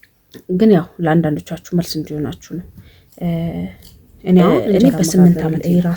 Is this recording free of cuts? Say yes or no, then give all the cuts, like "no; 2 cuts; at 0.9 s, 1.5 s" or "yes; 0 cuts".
no; 1 cut; at 4.8 s